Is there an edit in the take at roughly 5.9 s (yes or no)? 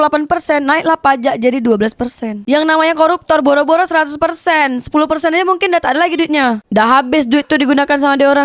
no